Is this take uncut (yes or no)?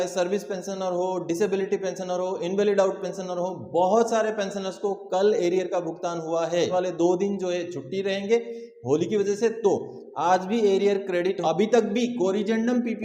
no